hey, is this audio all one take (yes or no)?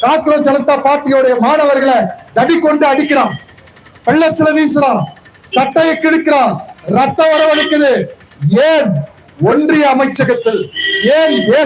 yes